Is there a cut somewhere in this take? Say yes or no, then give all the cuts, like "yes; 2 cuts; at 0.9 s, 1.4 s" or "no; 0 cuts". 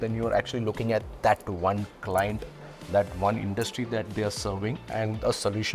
no; 0 cuts